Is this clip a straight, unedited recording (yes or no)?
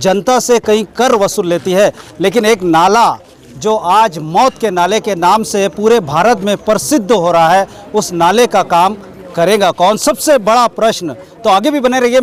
yes